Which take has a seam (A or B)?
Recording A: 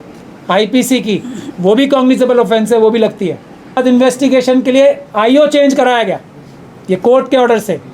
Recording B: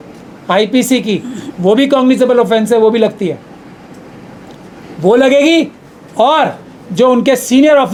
A